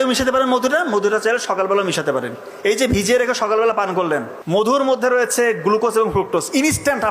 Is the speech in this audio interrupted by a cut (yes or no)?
yes